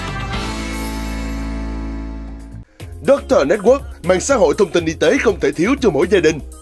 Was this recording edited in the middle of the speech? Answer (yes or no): no